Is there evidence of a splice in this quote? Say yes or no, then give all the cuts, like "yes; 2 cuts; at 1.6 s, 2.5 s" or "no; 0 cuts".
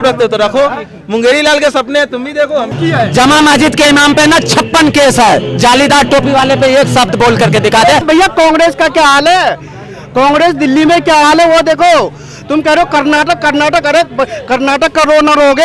yes; 2 cuts; at 2.7 s, 8.0 s